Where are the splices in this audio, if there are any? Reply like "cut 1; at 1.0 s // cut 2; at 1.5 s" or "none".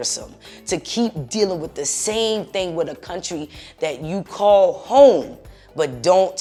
none